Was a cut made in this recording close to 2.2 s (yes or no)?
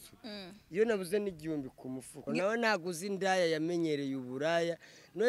yes